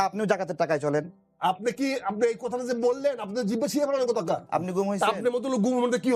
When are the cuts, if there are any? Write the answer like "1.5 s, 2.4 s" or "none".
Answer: 1.2 s, 4.4 s